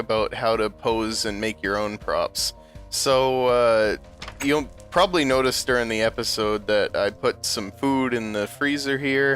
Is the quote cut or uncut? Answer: cut